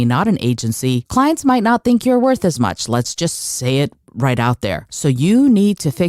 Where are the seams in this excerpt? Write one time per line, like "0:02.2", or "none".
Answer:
0:01.0
0:04.9